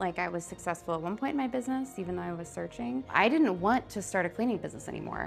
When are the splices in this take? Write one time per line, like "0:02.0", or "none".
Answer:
0:03.1